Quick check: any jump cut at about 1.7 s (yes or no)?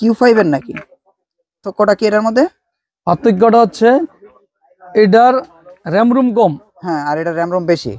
yes